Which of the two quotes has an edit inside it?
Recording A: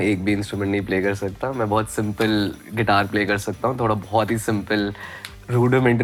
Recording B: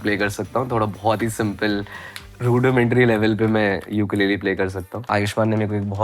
B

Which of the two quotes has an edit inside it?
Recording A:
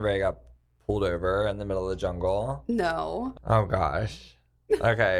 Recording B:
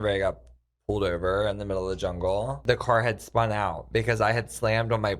B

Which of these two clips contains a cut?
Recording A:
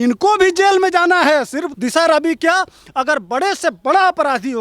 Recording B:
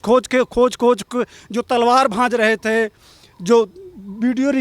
A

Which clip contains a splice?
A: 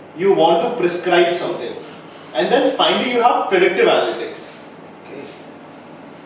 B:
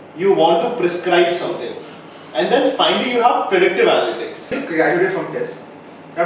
B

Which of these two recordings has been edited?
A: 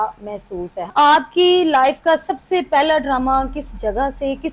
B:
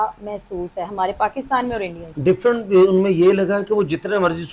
A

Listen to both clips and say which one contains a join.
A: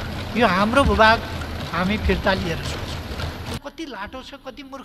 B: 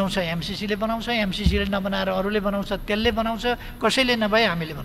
A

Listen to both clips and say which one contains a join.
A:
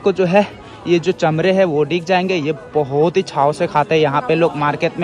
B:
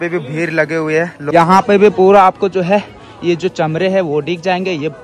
B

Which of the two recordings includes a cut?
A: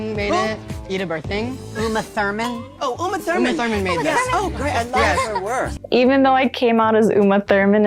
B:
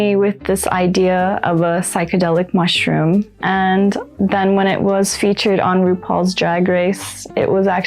B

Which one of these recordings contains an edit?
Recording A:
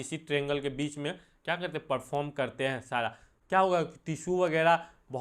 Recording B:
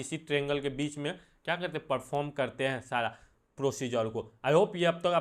A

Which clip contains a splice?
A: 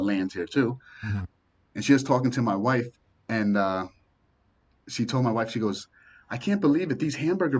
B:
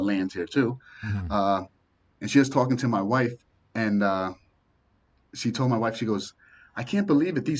A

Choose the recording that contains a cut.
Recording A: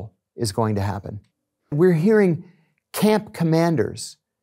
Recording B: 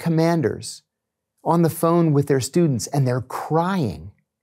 A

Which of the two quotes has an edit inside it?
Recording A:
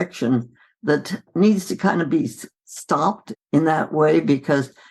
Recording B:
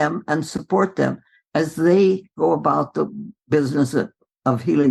A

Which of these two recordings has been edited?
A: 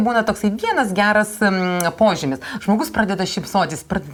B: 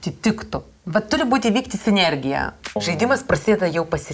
B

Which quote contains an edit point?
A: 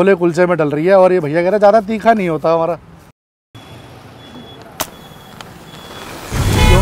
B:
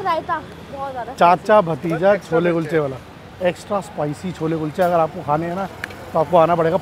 A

